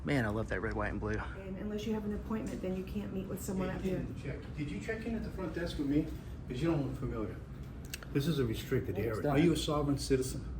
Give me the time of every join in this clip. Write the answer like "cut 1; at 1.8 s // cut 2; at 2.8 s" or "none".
cut 1; at 1.6 s // cut 2; at 9.2 s